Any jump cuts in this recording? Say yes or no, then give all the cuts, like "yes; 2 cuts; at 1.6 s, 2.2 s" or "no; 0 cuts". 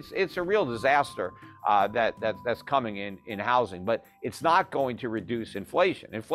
no; 0 cuts